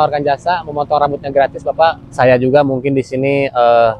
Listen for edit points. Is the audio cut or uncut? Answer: cut